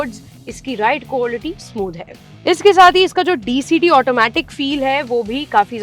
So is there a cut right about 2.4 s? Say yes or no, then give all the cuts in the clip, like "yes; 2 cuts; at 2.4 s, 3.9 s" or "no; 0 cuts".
no; 0 cuts